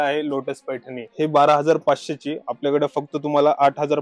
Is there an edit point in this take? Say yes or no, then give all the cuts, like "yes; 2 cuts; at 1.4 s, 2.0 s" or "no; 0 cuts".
yes; 1 cut; at 1.0 s